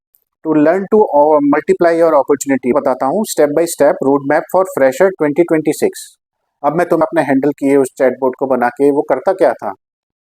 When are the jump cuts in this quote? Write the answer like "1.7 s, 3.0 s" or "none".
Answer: 2.7 s, 7.0 s

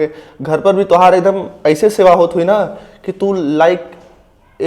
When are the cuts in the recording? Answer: none

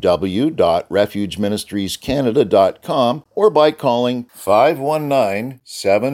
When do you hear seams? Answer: 3.2 s

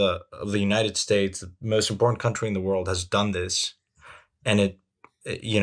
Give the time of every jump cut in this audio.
none

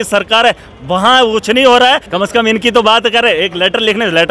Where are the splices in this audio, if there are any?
2.1 s

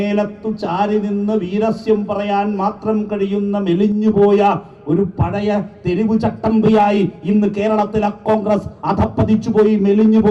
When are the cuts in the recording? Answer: none

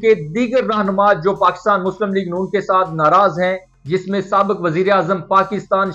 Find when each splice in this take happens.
none

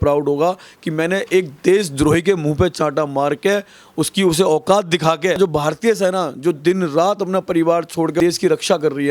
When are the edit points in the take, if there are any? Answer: 5.4 s, 8.2 s

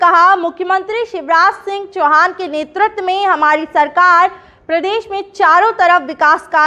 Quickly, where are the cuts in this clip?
none

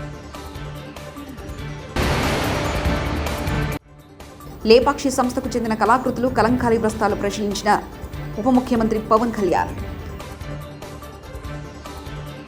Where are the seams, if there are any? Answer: none

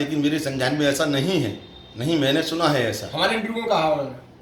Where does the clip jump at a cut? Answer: none

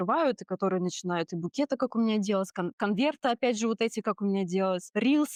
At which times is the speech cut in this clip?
none

